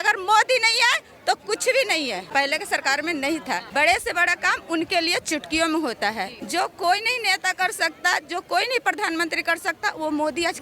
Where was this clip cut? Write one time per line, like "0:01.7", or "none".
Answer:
0:02.3
0:03.7
0:06.4